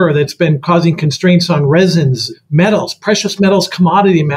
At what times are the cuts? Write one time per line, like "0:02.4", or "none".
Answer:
0:02.2